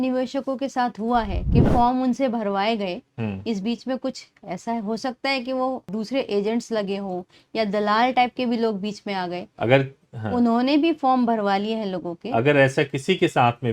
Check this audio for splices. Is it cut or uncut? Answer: uncut